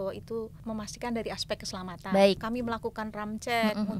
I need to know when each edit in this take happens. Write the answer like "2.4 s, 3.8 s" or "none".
2.4 s